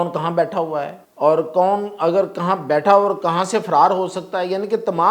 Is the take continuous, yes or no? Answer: no